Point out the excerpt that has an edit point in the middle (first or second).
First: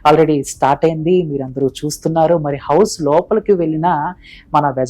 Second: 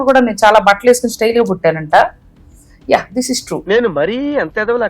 second